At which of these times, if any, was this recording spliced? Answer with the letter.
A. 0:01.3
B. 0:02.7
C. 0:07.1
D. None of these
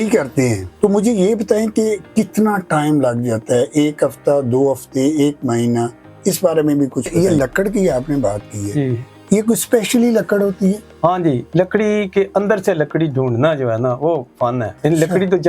C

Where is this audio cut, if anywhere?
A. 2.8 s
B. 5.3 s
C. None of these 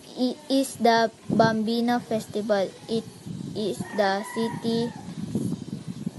A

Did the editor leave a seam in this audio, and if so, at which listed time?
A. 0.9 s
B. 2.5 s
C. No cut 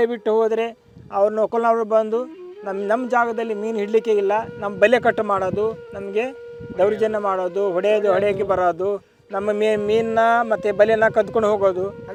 C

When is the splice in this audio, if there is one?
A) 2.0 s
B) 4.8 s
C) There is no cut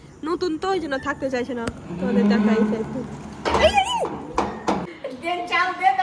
B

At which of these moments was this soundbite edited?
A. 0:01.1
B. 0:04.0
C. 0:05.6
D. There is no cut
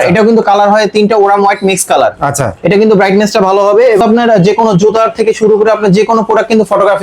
B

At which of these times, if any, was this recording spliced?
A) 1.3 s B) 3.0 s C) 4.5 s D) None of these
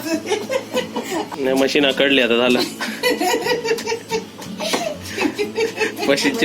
A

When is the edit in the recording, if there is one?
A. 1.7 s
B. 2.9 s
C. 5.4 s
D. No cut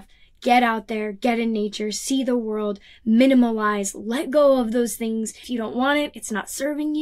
C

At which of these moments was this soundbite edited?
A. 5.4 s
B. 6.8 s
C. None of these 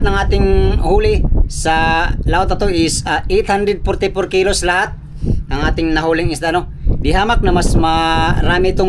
C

